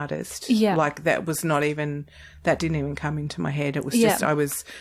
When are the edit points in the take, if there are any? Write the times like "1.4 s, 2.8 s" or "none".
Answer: none